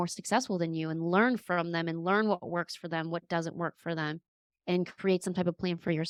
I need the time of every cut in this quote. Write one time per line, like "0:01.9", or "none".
none